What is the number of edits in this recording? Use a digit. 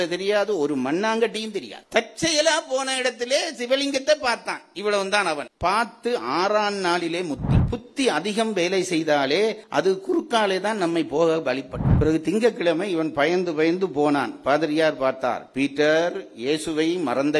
2